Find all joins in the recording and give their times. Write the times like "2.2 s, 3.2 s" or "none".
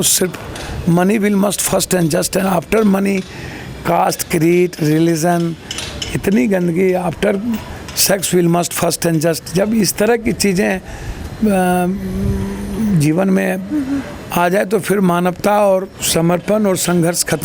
none